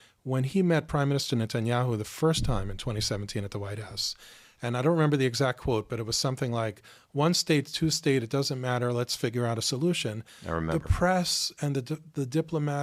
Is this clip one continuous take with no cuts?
yes; 0 cuts

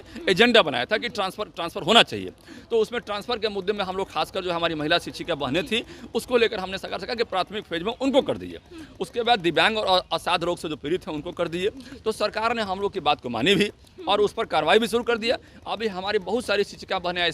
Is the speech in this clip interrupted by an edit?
no; 0 cuts

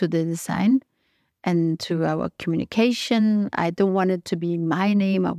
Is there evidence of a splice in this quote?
no; 0 cuts

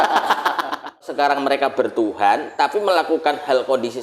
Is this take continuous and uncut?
no; 1 cut; at 1.1 s

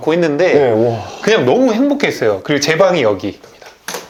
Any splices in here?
no; 0 cuts

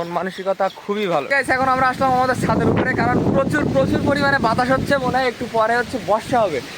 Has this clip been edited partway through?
yes; 1 cut; at 1.3 s

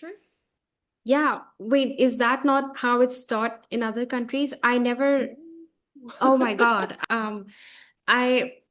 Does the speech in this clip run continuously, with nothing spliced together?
no; 1 cut; at 7.0 s

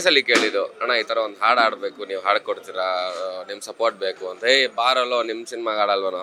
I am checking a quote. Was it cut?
no; 0 cuts

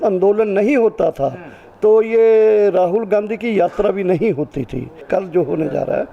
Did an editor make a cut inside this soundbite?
yes; 1 cut; at 4.9 s

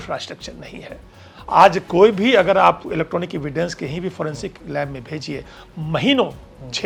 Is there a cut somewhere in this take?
no; 0 cuts

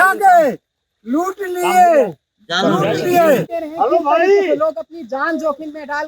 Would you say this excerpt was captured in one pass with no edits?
no; 1 cut; at 3.6 s

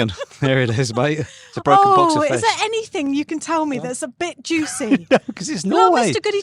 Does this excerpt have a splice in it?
no; 0 cuts

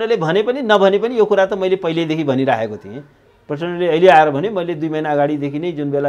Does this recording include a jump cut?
no; 0 cuts

